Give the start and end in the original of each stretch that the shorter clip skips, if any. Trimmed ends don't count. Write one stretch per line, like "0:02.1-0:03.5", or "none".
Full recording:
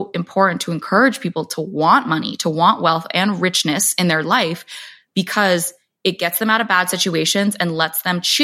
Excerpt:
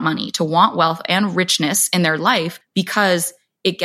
0:04.6-0:05.0